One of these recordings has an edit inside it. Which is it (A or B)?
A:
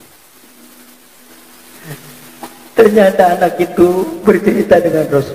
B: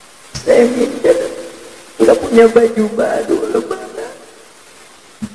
A